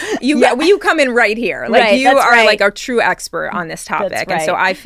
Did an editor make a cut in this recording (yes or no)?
no